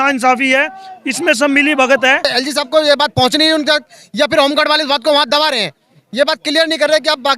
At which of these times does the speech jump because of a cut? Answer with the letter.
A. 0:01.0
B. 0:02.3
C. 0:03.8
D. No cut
B